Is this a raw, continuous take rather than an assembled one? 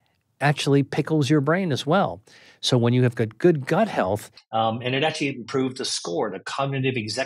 no; 1 cut; at 4.3 s

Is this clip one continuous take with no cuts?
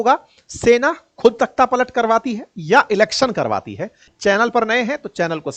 no; 1 cut; at 4.0 s

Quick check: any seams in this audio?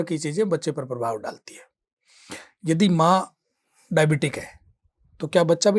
no; 0 cuts

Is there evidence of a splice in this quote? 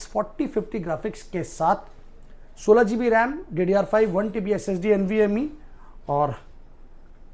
no; 0 cuts

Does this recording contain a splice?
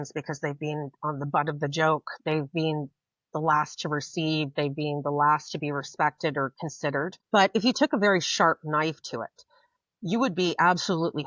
yes; 1 cut; at 7.2 s

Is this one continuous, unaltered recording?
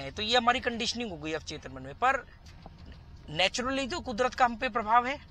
yes; 0 cuts

